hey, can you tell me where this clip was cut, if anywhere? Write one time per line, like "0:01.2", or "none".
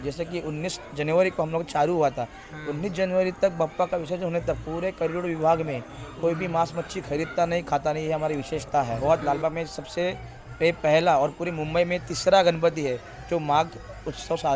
0:09.0